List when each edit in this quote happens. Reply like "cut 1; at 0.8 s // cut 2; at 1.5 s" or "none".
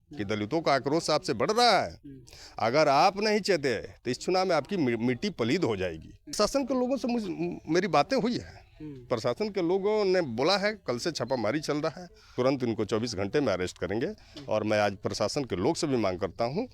cut 1; at 6.3 s // cut 2; at 12.3 s